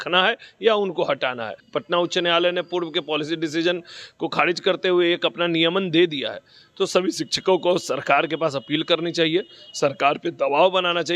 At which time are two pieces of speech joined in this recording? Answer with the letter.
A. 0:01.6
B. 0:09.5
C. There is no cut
A